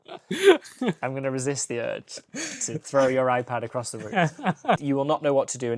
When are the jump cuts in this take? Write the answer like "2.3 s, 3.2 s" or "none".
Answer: 4.8 s